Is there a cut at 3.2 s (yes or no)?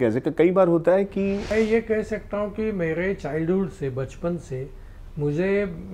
no